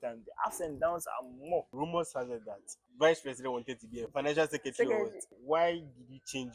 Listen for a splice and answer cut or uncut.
cut